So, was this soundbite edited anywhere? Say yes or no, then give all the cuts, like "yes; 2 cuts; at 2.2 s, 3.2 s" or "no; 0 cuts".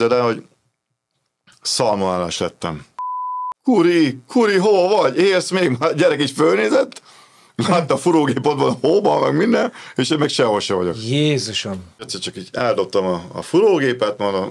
yes; 2 cuts; at 3.4 s, 12.1 s